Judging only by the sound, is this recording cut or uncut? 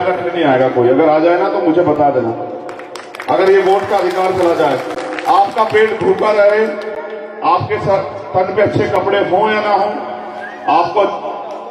uncut